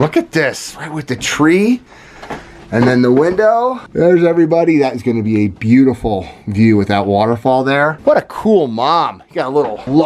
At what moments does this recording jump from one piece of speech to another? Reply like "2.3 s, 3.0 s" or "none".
none